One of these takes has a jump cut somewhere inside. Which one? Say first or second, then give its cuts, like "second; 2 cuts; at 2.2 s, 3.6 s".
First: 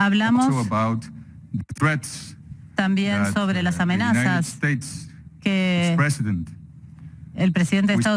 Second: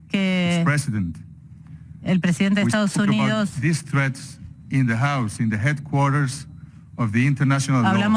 second; 1 cut; at 7.1 s